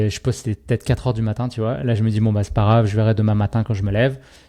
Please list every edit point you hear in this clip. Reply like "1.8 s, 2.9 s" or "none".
none